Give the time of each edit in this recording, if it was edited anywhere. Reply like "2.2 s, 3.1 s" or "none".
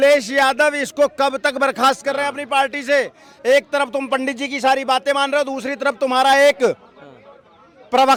none

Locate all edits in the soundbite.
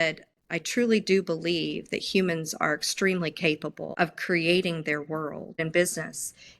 3.8 s, 5.6 s

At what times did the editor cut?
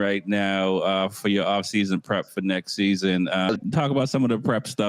3.6 s

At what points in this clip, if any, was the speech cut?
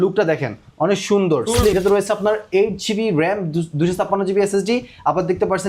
1.7 s

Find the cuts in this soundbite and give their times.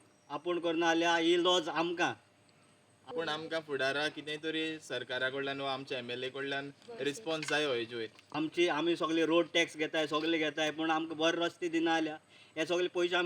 3.0 s, 8.2 s

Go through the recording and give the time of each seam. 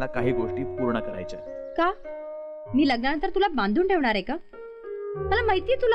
none

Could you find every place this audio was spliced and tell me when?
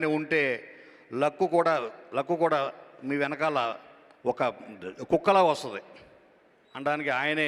none

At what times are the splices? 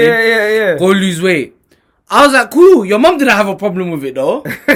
none

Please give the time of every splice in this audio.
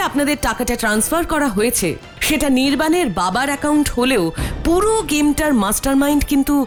none

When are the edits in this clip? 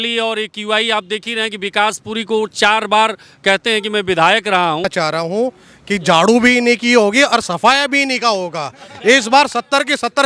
4.9 s

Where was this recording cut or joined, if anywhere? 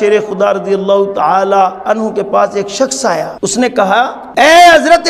3.3 s, 4.2 s

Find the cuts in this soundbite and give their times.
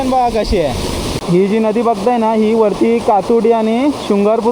1.1 s

